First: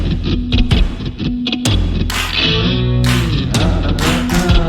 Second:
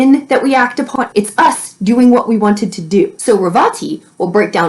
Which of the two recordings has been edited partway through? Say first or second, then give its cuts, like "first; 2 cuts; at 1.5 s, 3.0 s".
second; 2 cuts; at 0.9 s, 3.2 s